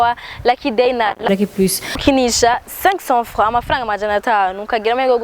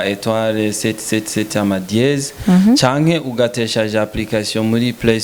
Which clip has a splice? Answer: first; 1 cut; at 1.3 s

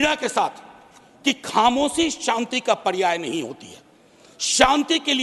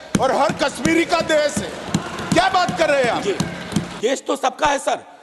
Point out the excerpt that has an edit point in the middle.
second; 1 cut; at 4.0 s

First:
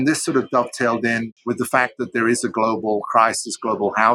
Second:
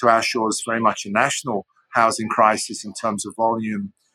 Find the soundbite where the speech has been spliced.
first; 1 cut; at 1.3 s

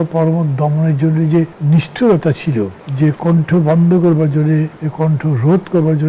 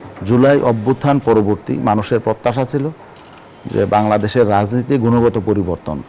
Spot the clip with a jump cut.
first; 3 cuts; at 1.6 s, 2.8 s, 4.8 s

